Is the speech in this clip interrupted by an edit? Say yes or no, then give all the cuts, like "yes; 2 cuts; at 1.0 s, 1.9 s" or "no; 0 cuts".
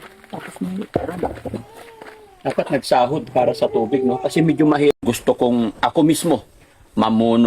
yes; 1 cut; at 5.0 s